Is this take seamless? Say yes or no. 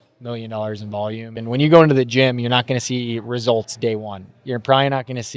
no